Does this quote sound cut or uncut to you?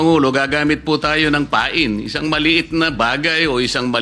uncut